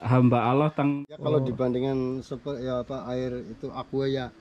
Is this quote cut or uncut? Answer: cut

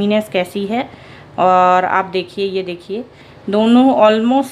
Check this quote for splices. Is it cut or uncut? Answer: uncut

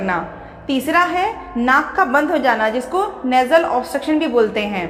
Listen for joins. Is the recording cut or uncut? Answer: uncut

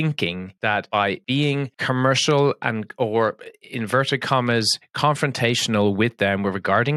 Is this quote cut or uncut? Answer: uncut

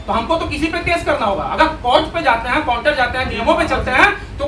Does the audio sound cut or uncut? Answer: uncut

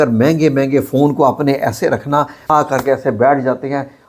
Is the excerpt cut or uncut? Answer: cut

